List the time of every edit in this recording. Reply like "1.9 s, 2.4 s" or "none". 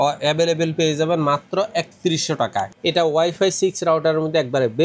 2.7 s